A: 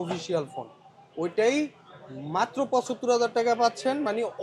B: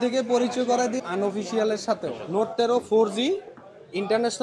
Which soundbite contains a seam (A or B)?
B